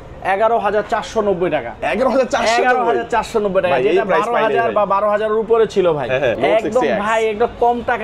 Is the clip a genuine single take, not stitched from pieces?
no; 1 cut; at 6.4 s

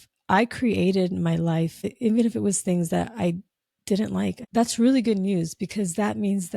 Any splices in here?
yes; 2 cuts; at 1.9 s, 4.4 s

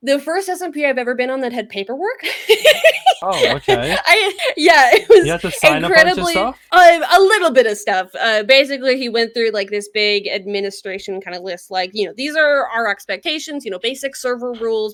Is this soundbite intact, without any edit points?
yes; 0 cuts

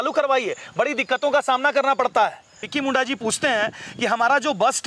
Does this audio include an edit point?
yes; 1 cut; at 2.7 s

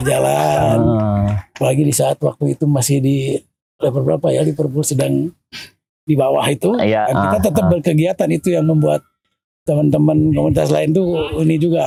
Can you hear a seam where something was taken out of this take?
no; 0 cuts

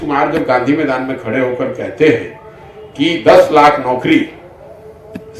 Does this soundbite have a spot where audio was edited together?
no; 0 cuts

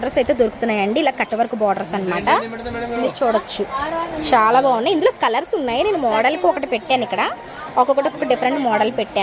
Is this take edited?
no; 0 cuts

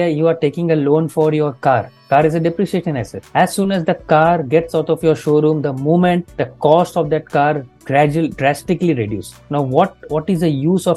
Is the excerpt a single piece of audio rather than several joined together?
yes; 0 cuts

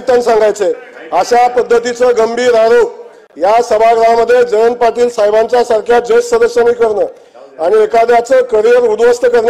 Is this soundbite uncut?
yes; 0 cuts

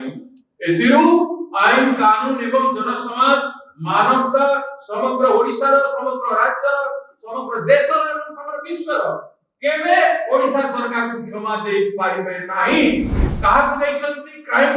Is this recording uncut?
no; 1 cut; at 13.2 s

